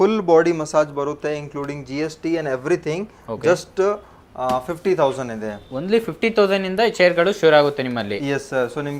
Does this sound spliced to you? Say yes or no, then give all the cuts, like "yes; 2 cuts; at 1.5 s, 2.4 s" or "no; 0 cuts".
no; 0 cuts